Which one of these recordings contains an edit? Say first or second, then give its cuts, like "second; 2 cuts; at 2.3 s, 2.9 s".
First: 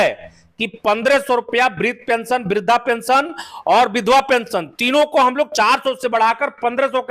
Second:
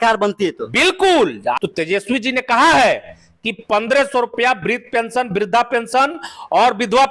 second; 1 cut; at 1.6 s